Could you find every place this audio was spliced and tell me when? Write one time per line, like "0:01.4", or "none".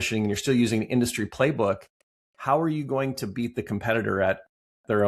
none